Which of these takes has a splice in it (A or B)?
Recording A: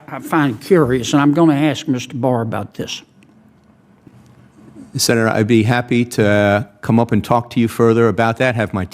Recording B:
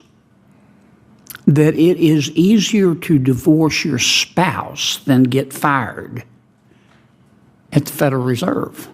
A